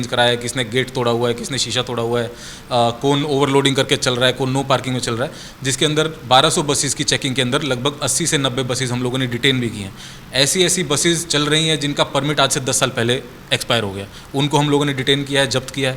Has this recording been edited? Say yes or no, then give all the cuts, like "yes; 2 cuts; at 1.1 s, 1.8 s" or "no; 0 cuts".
no; 0 cuts